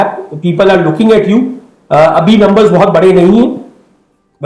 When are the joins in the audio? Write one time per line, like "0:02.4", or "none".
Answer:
none